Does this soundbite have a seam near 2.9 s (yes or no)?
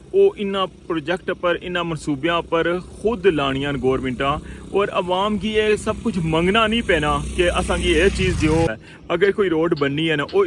no